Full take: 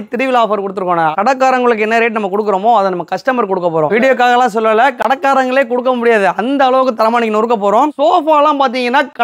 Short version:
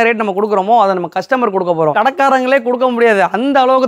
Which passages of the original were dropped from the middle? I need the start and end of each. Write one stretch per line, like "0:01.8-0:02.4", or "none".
0:03.9-0:05.0

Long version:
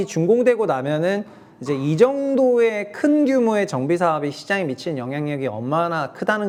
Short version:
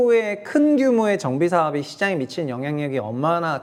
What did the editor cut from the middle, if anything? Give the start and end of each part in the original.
none

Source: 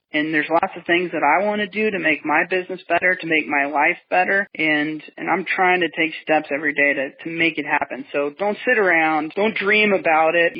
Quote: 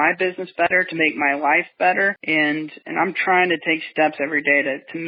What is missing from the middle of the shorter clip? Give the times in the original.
none

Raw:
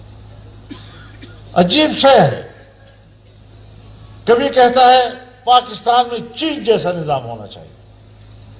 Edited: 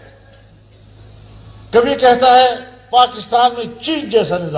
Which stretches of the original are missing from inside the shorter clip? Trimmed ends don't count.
none

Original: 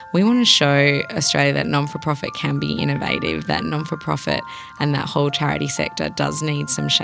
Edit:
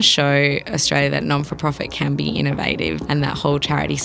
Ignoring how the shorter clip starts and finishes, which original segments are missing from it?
0:03.4-0:04.7

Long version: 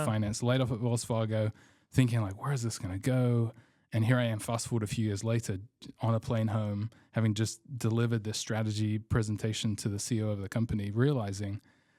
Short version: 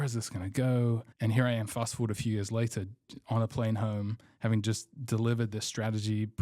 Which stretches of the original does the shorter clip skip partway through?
0:03.6-0:03.8

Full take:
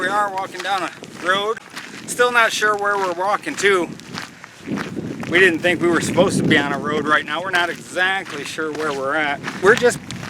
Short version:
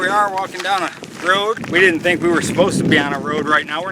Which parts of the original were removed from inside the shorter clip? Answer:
0:01.6-0:05.2

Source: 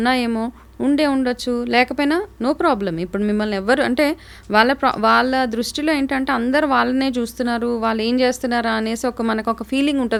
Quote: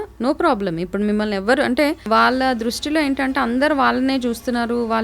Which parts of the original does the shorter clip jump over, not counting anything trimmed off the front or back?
0:04.2-0:05.0

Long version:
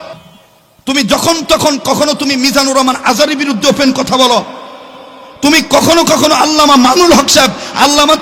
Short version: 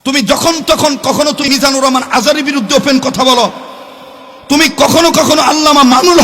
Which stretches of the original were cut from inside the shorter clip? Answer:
0:02.3-0:02.4

